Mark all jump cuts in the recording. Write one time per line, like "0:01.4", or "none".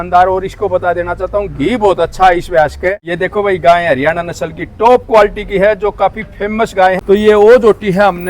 0:03.0
0:07.0